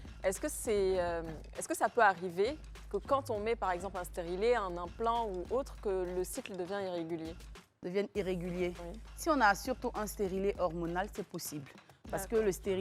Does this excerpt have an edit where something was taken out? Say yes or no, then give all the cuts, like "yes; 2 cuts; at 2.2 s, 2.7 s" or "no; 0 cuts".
no; 0 cuts